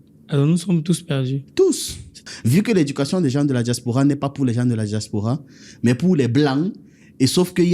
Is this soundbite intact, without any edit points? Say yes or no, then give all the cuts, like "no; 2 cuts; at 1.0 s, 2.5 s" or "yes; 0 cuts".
no; 1 cut; at 2.2 s